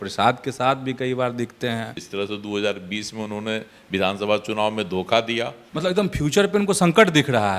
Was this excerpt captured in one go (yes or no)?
no